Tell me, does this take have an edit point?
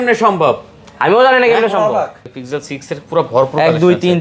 yes; 1 cut; at 2.3 s

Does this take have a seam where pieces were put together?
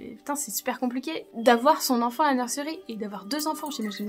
no; 0 cuts

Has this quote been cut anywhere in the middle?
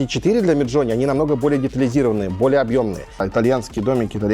yes; 1 cut; at 3.3 s

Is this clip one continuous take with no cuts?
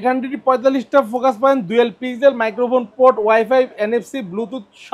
yes; 0 cuts

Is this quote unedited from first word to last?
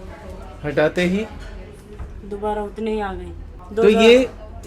yes; 0 cuts

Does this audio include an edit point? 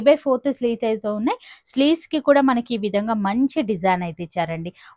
no; 0 cuts

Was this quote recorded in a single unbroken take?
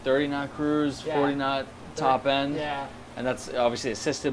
yes; 0 cuts

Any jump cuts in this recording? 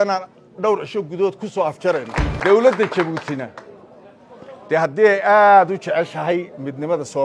yes; 1 cut; at 2.2 s

